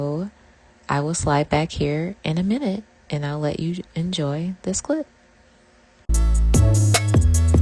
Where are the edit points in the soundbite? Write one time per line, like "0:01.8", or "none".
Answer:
0:06.1